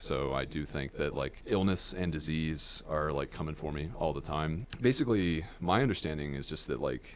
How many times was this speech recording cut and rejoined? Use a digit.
2